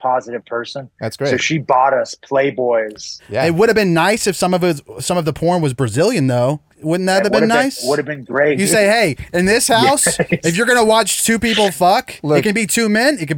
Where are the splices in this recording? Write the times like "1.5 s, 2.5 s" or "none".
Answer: 3.2 s, 6.7 s, 8.6 s